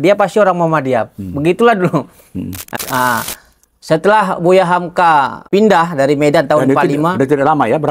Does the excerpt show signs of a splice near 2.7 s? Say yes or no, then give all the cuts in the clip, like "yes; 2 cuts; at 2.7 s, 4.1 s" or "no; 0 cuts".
yes; 1 cut; at 2.7 s